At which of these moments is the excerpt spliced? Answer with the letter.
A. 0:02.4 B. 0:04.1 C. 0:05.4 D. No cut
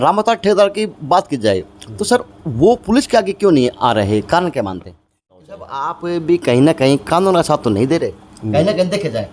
C